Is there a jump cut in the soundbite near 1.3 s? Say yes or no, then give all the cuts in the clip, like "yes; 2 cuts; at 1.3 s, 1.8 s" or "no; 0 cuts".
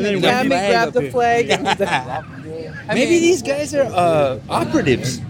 no; 1 cut; at 2.6 s